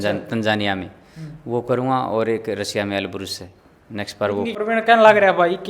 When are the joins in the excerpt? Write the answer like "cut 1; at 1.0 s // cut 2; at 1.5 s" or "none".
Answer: cut 1; at 4.5 s